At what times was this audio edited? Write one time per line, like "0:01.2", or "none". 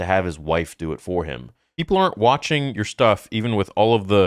0:01.7